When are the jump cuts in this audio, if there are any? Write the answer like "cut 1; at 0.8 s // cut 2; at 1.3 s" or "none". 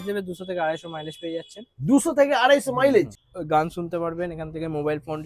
cut 1; at 3.2 s